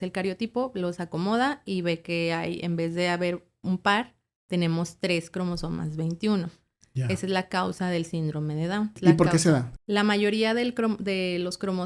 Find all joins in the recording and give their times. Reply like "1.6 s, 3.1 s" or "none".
8.9 s, 9.7 s

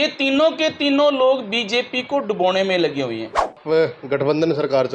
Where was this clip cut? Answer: 3.6 s

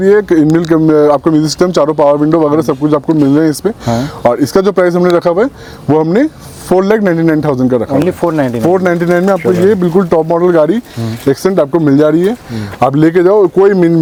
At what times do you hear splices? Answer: none

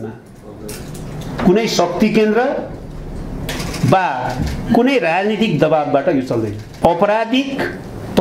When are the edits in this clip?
6.7 s

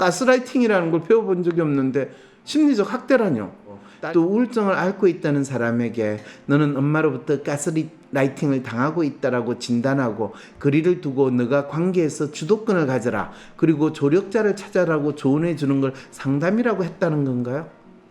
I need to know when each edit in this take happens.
3.9 s

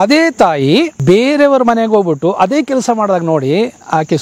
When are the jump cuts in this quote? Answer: 1.0 s

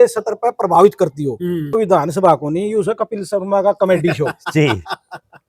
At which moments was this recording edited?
1.8 s

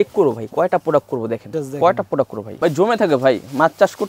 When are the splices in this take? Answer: 1.5 s, 2.4 s

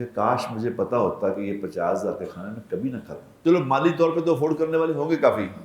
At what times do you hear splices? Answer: 3.2 s

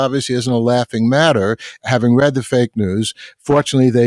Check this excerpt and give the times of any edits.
none

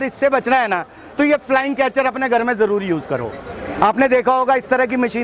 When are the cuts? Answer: none

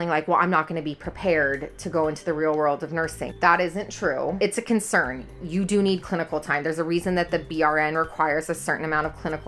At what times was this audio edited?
3.2 s, 4.4 s

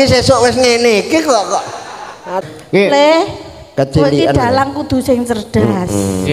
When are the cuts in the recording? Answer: 2.4 s

